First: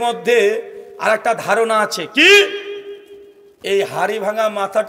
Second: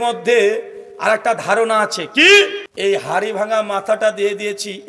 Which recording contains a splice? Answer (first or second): second